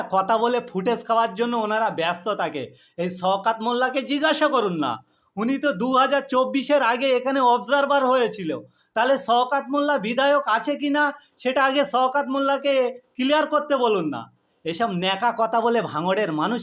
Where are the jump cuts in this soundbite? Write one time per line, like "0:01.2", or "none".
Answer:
none

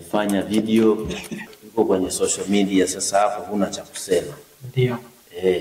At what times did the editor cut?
0:01.4

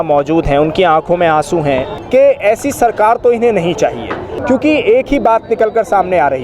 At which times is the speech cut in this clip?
0:01.9
0:04.3

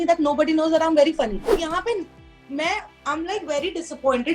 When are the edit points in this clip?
0:01.6

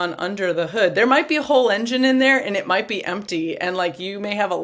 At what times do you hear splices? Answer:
none

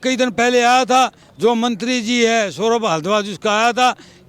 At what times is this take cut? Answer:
none

